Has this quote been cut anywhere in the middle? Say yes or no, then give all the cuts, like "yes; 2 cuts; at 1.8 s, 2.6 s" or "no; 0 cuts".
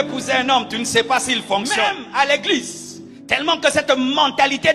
yes; 1 cut; at 2.0 s